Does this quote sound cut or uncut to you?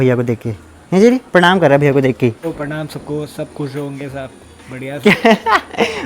cut